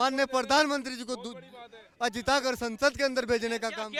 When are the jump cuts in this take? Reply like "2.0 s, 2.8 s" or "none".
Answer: none